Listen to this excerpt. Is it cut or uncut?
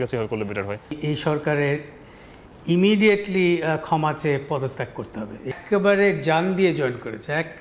cut